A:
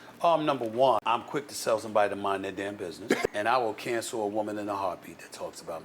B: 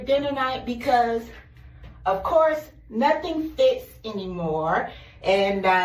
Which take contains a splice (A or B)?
A